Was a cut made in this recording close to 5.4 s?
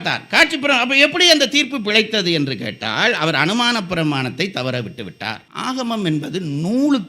yes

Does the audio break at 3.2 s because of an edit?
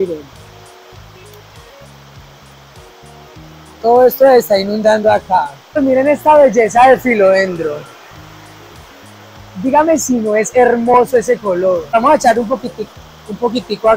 no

